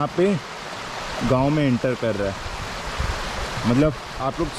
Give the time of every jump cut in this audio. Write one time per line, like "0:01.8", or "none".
none